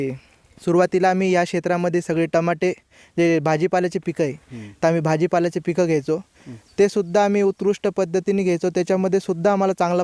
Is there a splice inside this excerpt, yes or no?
no